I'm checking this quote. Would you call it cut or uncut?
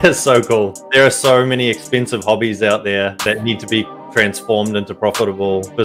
uncut